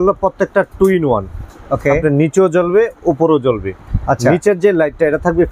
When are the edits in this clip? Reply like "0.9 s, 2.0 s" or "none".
none